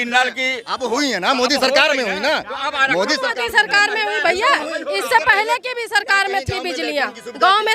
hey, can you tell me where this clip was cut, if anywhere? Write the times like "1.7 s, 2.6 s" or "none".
none